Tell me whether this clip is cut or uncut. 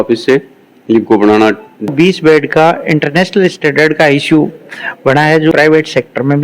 cut